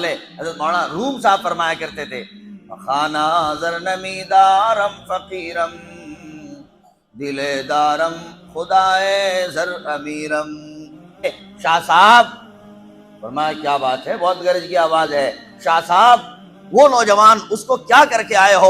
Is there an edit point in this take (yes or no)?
yes